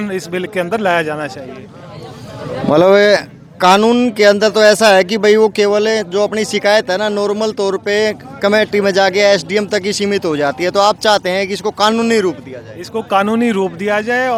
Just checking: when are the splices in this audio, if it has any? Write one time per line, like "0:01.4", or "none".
none